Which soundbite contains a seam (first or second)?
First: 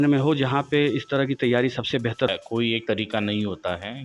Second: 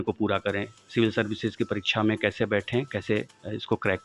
first